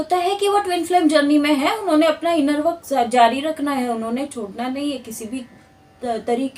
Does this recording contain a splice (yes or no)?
no